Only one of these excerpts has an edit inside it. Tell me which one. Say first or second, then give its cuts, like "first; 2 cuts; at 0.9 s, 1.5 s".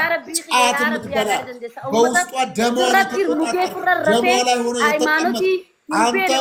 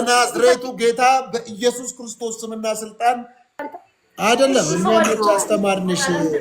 second; 1 cut; at 3.7 s